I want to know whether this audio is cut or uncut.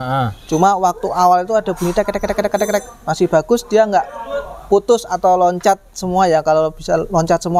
uncut